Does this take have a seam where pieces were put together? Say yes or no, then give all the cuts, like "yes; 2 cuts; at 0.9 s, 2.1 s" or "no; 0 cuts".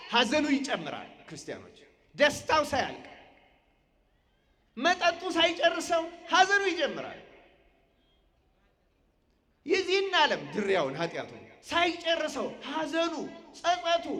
no; 0 cuts